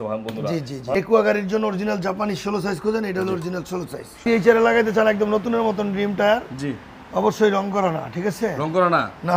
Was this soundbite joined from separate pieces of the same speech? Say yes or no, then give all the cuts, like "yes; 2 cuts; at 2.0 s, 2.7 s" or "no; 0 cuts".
yes; 2 cuts; at 0.9 s, 4.2 s